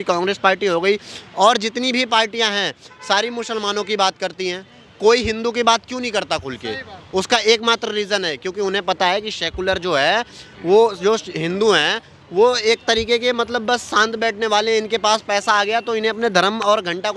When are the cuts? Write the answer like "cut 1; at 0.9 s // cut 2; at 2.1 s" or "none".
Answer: none